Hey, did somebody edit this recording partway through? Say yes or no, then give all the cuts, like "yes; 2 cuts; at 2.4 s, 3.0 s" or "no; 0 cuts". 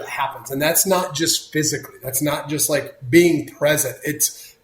no; 0 cuts